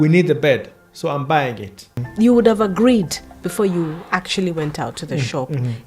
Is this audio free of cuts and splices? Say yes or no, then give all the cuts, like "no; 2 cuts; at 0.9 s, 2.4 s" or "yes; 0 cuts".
no; 1 cut; at 2.0 s